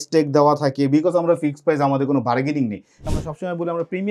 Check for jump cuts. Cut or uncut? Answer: cut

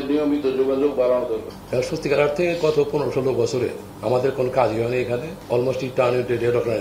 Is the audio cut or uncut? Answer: cut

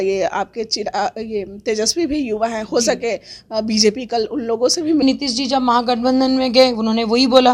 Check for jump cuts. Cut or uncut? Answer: cut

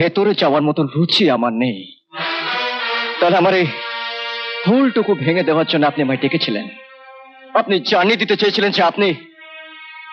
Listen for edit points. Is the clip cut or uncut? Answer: uncut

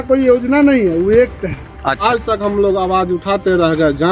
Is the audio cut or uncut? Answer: cut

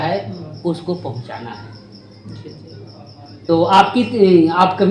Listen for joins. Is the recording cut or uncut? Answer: uncut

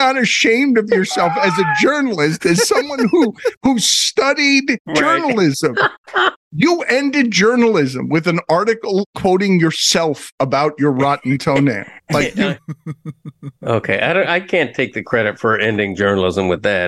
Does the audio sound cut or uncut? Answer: cut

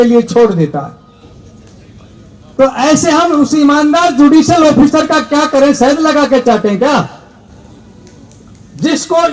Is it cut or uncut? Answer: uncut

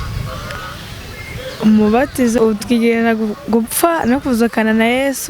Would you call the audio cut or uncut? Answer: cut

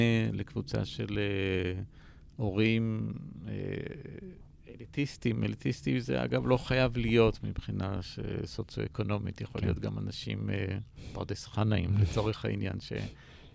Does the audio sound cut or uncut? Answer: uncut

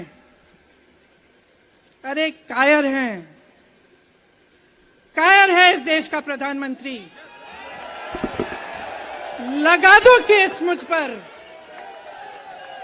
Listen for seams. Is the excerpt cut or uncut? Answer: uncut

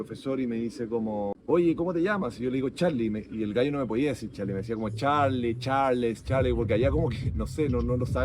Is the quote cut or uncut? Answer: cut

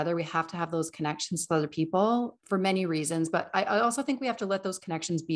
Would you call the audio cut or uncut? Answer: cut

